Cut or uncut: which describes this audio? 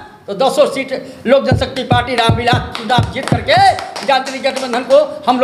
uncut